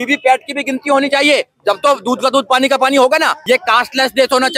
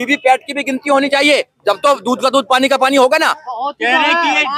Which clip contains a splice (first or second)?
first